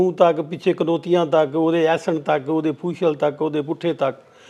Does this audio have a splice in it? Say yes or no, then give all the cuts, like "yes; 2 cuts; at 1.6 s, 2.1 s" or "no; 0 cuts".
no; 0 cuts